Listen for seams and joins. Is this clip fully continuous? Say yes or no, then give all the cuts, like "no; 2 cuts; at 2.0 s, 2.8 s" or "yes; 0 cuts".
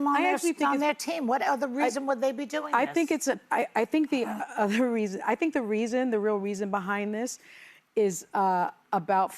yes; 0 cuts